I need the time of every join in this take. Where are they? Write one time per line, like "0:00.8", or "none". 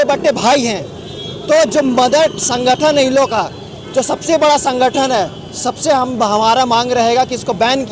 none